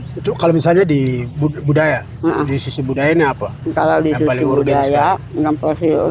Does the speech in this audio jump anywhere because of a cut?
no; 0 cuts

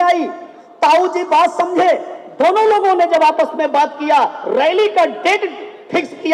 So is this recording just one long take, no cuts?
yes; 0 cuts

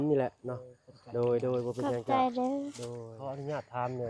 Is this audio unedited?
no; 1 cut; at 3.1 s

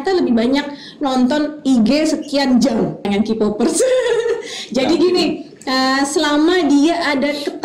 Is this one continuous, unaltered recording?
no; 1 cut; at 3.0 s

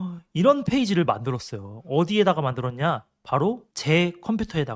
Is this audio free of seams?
yes; 0 cuts

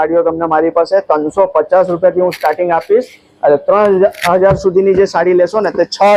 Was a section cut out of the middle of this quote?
no; 0 cuts

